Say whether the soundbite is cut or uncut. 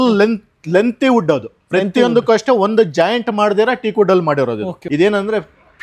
cut